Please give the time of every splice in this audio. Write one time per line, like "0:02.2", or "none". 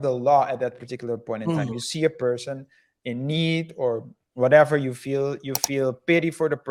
none